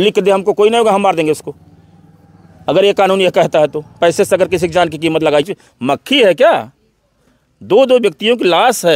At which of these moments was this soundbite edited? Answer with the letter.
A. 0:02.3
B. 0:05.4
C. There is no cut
B